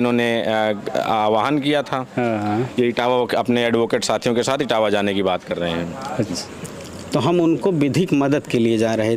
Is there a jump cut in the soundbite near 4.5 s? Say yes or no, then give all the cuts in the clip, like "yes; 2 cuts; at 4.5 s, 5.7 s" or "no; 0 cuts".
no; 1 cut; at 6.4 s